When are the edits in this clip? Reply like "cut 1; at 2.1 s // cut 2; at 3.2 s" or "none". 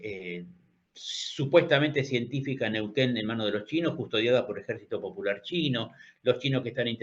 none